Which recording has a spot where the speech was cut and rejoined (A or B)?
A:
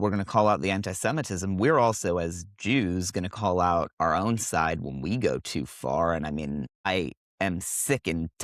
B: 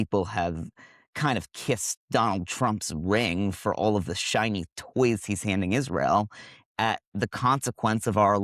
A